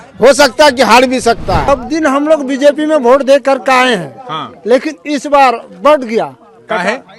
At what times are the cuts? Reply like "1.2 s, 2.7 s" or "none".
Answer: 1.7 s